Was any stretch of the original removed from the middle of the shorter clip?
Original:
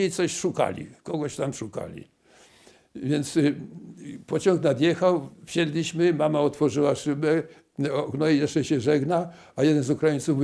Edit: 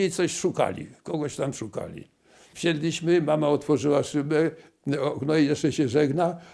yes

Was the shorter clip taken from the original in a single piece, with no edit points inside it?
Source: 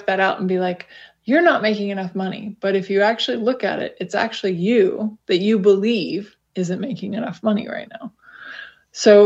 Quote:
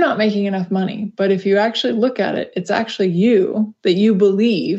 yes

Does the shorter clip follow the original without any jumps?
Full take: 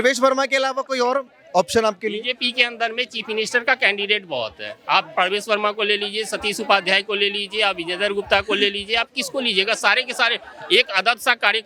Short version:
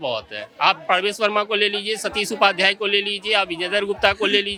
yes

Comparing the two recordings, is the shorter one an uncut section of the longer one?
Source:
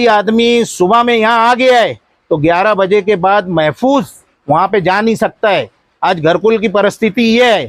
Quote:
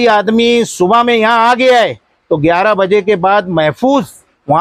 yes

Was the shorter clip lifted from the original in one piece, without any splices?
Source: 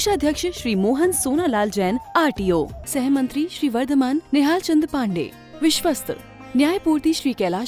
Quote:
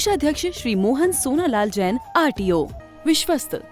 no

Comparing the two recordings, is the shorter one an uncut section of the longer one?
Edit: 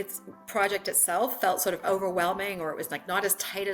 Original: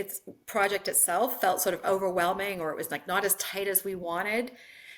yes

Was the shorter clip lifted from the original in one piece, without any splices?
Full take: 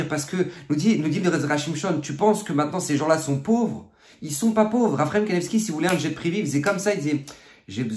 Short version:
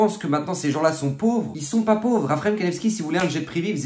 no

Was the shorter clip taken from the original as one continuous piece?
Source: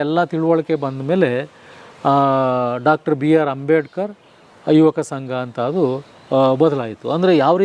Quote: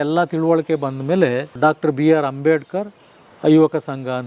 no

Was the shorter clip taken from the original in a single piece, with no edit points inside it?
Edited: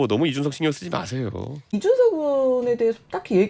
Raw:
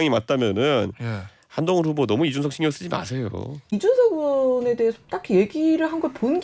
yes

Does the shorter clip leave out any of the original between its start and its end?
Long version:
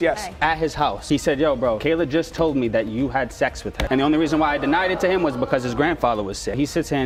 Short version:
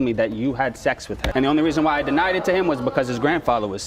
no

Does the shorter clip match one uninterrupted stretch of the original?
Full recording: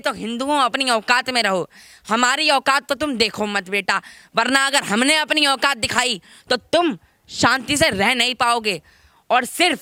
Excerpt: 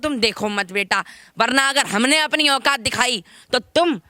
yes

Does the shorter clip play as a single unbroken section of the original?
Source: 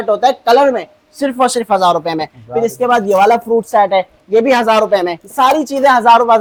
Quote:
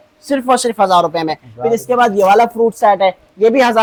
yes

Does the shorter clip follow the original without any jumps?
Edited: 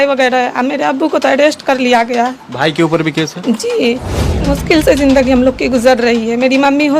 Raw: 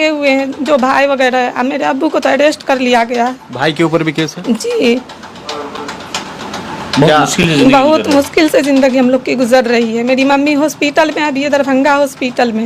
no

